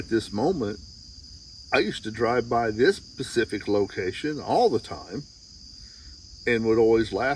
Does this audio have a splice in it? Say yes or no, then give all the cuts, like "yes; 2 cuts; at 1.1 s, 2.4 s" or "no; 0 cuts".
no; 0 cuts